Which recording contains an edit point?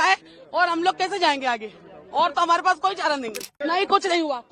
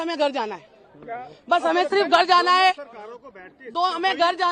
first; 1 cut; at 3.5 s

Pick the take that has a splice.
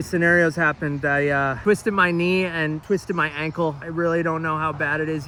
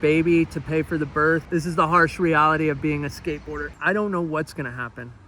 second; 2 cuts; at 1.4 s, 3.7 s

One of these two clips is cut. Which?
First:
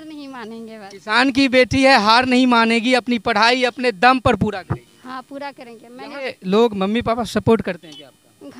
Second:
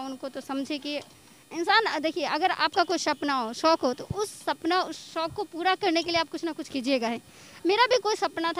first; 1 cut; at 6.2 s

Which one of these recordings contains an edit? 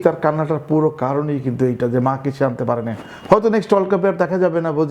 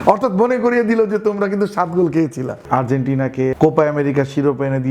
second; 2 cuts; at 2.6 s, 3.6 s

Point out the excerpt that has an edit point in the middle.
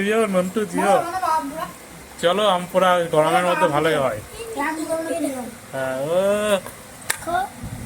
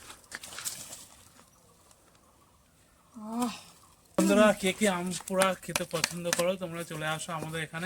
second; 1 cut; at 4.2 s

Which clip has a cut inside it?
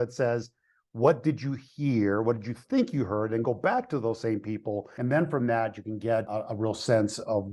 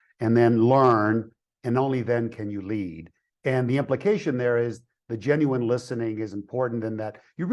first; 2 cuts; at 4.9 s, 6.3 s

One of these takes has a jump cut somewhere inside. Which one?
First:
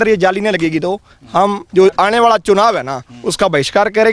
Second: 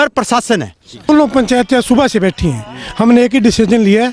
second; 1 cut; at 1.1 s

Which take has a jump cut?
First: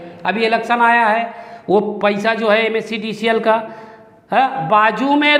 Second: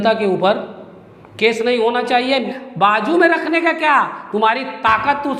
second; 1 cut; at 2.5 s

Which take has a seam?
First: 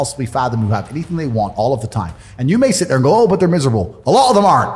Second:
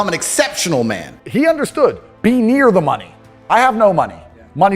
second; 1 cut; at 1.2 s

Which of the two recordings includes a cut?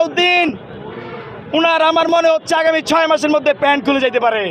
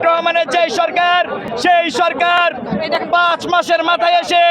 second; 1 cut; at 1.4 s

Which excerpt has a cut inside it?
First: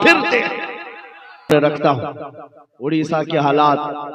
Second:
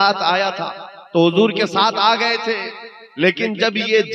first; 1 cut; at 1.5 s

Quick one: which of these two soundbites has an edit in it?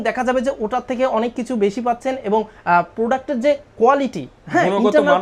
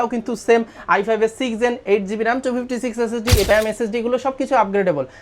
second; 1 cut; at 3.5 s

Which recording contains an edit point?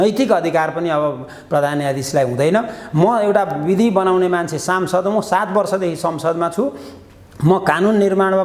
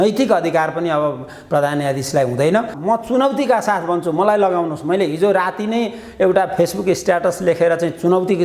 second; 1 cut; at 2.7 s

